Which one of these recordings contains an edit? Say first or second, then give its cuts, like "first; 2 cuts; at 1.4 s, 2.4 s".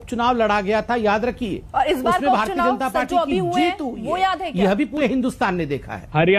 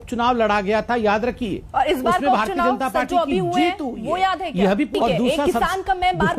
second; 1 cut; at 4.9 s